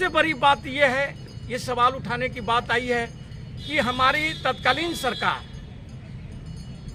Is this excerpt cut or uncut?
uncut